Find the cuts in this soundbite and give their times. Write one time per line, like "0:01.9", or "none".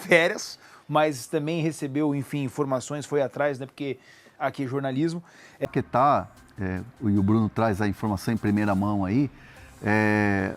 0:05.7